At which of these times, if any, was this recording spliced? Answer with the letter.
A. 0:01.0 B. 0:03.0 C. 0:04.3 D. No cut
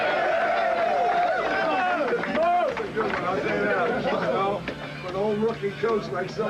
C